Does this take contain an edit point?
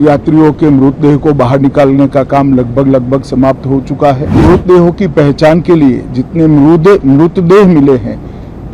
yes; 1 cut; at 4.4 s

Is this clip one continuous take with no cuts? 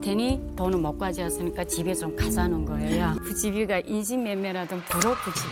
no; 1 cut; at 3.2 s

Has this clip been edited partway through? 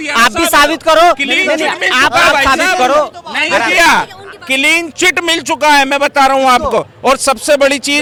no; 0 cuts

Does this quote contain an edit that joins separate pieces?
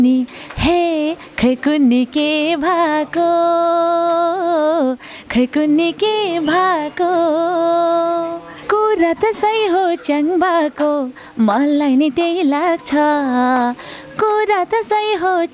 yes; 1 cut; at 8.5 s

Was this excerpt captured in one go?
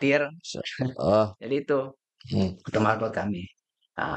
yes; 0 cuts

